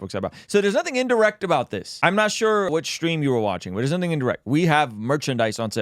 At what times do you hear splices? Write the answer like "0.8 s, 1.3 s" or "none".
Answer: 1.8 s, 2.7 s